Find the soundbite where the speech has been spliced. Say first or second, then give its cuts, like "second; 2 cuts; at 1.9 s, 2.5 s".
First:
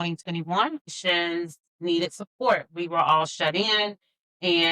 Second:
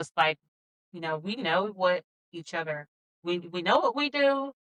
first; 1 cut; at 0.9 s